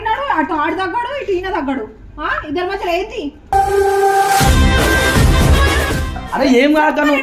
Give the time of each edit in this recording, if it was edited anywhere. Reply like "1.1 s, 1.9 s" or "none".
6.2 s